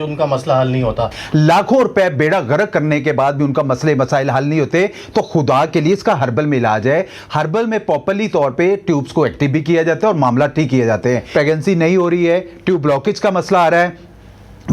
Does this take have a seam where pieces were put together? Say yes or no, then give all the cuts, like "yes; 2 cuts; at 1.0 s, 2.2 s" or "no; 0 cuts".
yes; 2 cuts; at 1.1 s, 11.2 s